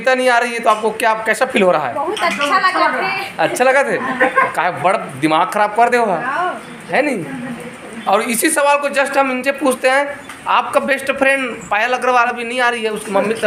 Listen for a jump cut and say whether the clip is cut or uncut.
uncut